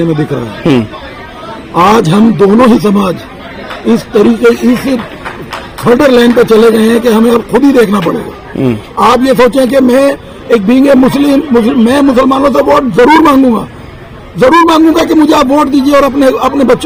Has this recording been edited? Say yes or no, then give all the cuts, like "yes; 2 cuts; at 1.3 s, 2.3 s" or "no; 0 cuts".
no; 0 cuts